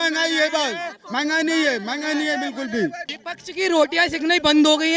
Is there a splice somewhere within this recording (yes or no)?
no